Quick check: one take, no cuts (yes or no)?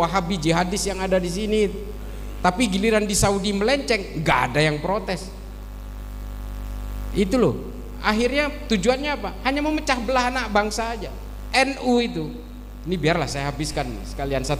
yes